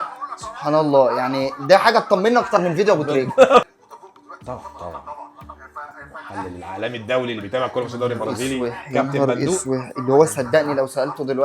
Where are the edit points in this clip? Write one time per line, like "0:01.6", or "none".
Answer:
0:03.6